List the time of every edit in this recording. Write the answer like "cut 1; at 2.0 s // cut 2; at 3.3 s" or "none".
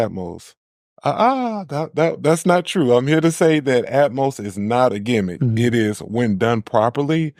none